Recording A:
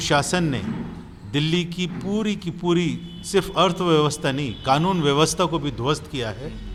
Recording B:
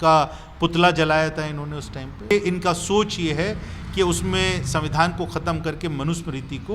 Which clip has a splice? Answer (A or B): B